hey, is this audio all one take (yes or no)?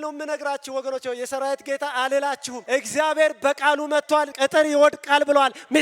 no